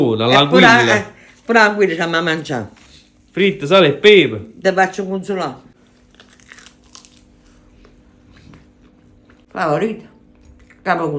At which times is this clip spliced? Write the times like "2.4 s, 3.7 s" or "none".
9.5 s